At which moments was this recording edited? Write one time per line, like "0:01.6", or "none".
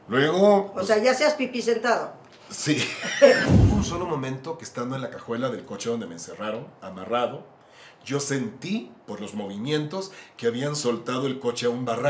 0:03.4